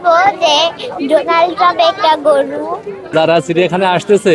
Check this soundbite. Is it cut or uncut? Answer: cut